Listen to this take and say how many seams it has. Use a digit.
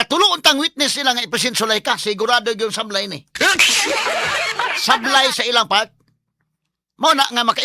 1